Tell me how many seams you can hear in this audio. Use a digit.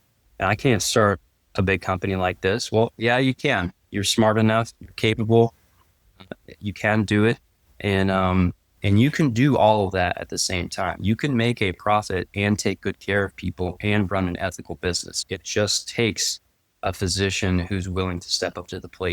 3